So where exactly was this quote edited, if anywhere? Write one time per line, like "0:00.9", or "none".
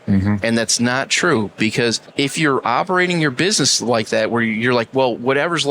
0:02.0